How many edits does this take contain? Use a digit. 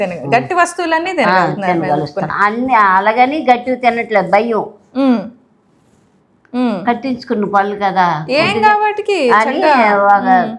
0